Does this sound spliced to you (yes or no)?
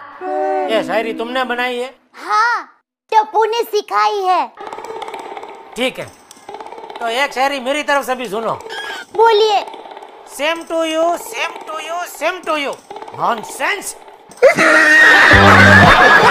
no